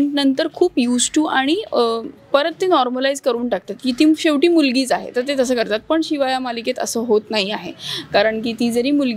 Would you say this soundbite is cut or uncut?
uncut